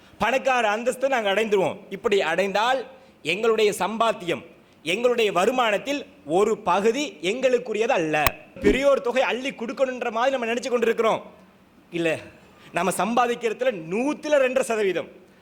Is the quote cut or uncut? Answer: cut